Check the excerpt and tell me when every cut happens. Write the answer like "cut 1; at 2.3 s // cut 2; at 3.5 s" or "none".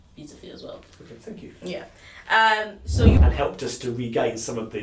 cut 1; at 3.2 s